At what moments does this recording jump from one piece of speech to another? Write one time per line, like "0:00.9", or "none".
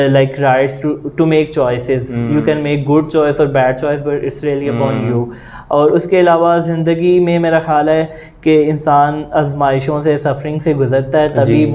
none

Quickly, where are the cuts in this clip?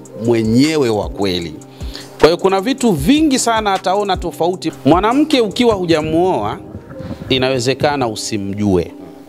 0:04.7

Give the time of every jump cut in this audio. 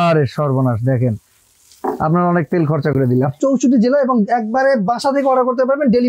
0:03.4

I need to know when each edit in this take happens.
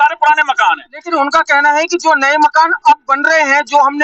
none

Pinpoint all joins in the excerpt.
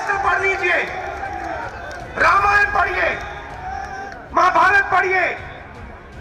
0:01.7
0:04.1

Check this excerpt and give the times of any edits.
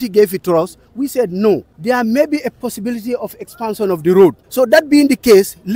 0:01.7
0:04.4

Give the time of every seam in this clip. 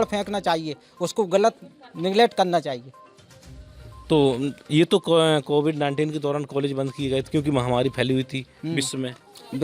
none

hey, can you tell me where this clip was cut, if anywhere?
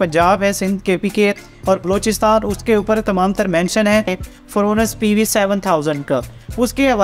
0:04.2

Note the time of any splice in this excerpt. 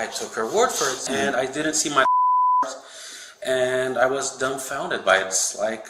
0:01.0

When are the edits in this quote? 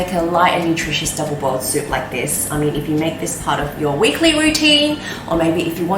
none

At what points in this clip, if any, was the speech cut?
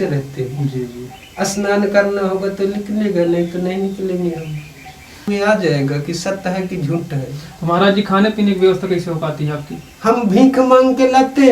0:05.2

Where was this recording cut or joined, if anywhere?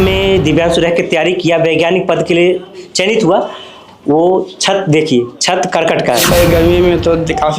0:06.2

